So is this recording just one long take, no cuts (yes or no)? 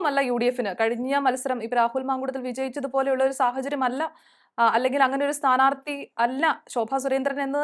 yes